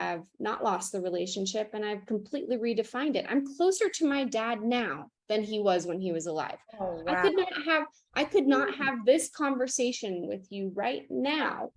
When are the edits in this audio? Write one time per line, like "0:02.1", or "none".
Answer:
none